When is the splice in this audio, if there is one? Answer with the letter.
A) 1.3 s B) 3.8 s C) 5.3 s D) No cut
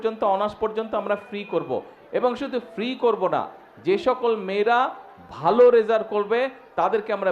D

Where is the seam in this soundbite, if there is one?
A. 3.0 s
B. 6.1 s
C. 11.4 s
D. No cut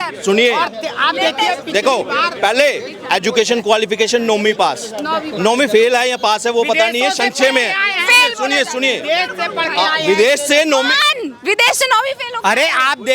D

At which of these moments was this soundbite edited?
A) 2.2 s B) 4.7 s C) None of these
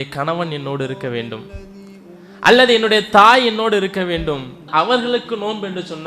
B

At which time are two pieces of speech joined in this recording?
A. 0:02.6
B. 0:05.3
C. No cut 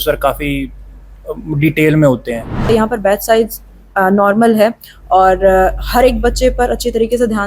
A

